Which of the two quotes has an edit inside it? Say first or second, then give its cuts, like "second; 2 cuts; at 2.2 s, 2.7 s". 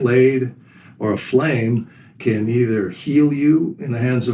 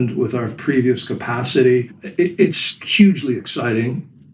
second; 1 cut; at 2.0 s